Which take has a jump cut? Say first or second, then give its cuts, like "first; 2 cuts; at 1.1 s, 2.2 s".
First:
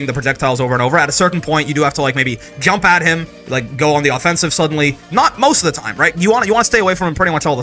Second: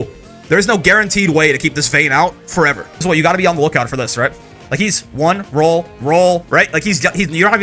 second; 1 cut; at 2.9 s